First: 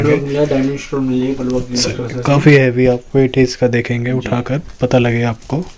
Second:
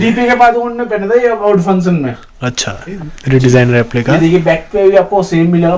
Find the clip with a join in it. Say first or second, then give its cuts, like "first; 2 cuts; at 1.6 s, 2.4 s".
second; 1 cut; at 3.0 s